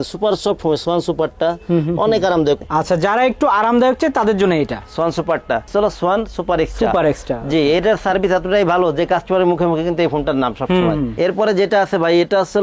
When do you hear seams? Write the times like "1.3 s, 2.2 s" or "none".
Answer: 2.6 s, 5.7 s, 11.1 s